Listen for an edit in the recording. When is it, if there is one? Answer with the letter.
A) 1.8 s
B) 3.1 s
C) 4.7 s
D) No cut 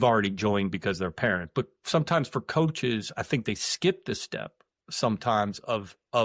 D